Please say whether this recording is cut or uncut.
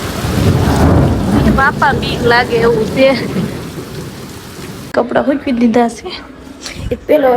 cut